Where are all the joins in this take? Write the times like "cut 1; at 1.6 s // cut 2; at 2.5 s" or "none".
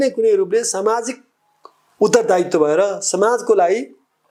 none